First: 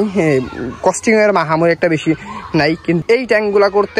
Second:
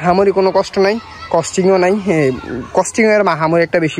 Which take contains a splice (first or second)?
first